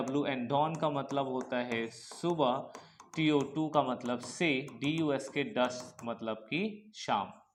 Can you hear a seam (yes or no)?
no